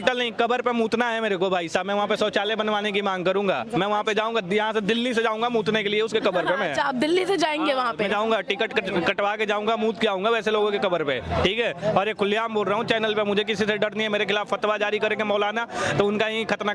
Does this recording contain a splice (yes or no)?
no